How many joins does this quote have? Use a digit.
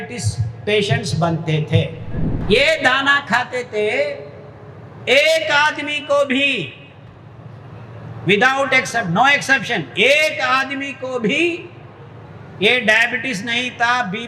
1